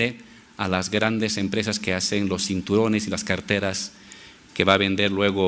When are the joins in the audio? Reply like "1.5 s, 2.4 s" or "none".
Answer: 2.7 s